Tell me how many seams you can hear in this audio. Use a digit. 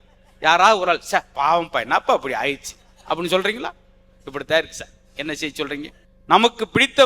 1